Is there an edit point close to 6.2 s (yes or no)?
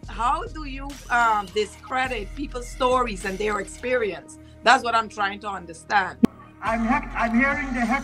yes